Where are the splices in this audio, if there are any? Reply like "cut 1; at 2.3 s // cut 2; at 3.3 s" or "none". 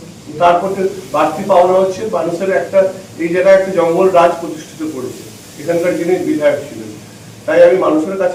none